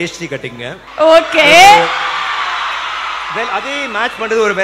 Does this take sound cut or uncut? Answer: uncut